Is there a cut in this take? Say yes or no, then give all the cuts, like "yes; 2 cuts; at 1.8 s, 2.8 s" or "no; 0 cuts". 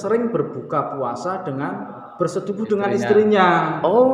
no; 0 cuts